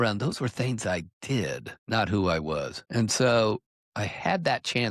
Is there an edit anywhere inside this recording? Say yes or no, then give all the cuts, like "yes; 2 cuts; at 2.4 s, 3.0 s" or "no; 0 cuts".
yes; 2 cuts; at 1.7 s, 2.8 s